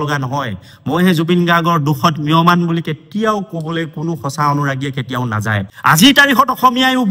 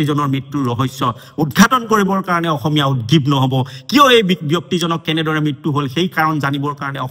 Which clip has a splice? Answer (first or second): first